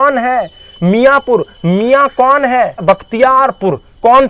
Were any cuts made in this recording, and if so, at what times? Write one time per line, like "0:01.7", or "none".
0:02.8